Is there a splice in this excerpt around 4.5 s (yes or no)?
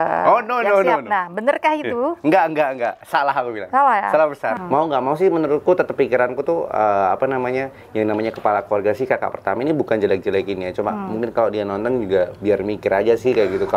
yes